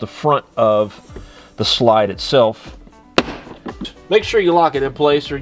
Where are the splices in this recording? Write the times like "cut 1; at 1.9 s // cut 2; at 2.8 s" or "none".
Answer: cut 1; at 3.8 s

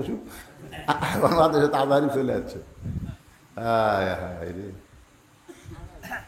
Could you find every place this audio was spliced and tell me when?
none

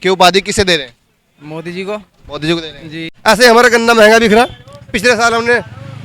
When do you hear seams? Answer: cut 1; at 3.1 s

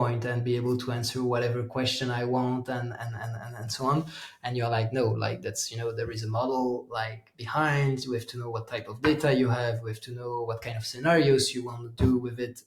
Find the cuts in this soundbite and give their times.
none

